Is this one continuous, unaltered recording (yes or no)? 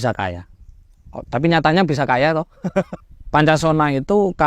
no